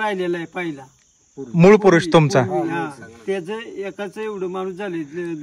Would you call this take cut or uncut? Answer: uncut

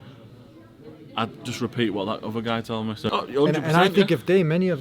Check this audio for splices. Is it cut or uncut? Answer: cut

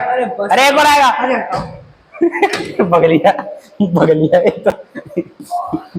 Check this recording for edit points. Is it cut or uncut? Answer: uncut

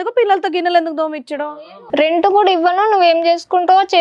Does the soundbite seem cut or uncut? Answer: cut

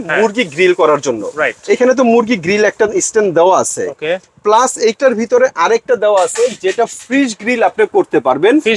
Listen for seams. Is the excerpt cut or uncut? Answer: uncut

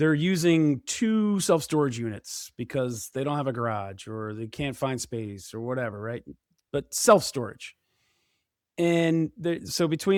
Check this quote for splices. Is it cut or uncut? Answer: uncut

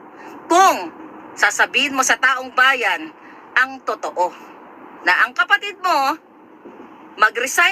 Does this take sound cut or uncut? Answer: uncut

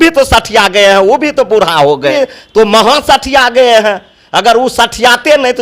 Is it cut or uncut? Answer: cut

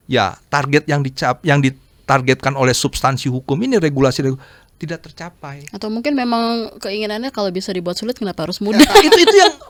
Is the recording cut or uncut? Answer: uncut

